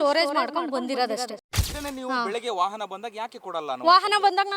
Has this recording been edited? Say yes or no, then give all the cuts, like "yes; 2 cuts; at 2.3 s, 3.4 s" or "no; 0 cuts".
yes; 1 cut; at 1.6 s